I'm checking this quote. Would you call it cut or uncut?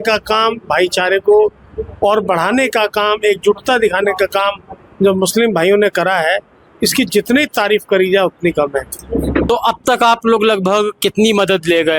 cut